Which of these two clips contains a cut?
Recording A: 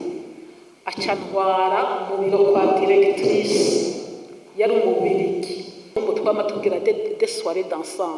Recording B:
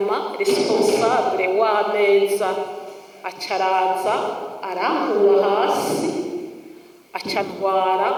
A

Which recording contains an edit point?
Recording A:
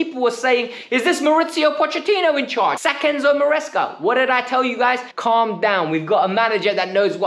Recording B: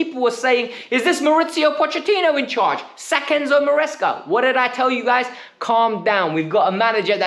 A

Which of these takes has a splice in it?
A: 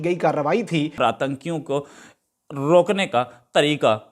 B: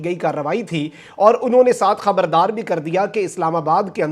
A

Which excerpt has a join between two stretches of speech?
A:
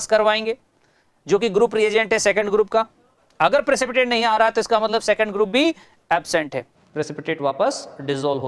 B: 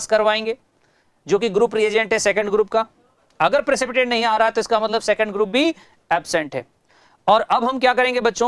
A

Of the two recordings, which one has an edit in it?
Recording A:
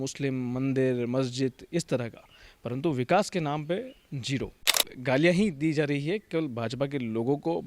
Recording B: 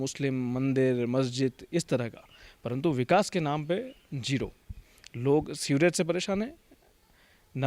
A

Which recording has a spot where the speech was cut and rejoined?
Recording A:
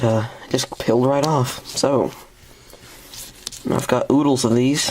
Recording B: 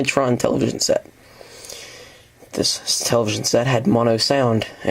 A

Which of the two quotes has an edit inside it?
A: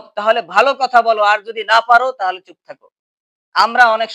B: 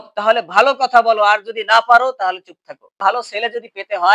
B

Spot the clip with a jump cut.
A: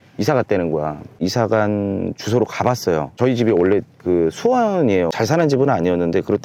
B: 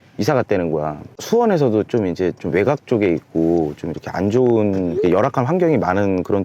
B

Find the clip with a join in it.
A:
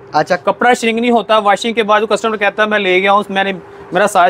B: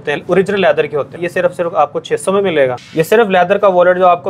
B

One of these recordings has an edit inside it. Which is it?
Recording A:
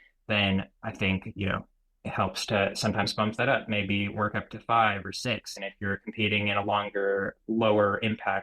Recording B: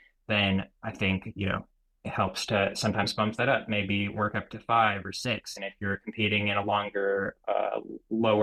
A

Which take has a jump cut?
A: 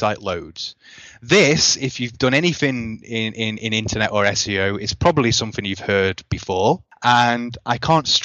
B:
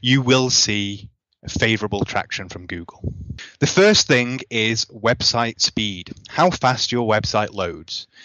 A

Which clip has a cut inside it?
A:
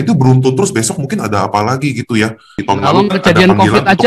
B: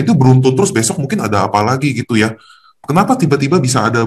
A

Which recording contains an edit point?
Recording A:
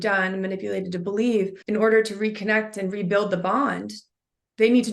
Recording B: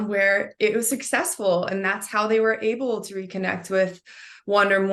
A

